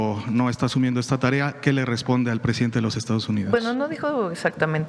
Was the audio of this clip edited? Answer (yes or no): no